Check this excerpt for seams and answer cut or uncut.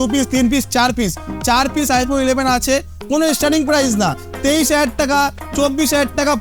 uncut